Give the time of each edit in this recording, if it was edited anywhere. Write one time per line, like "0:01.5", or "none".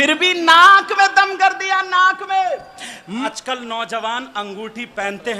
0:03.3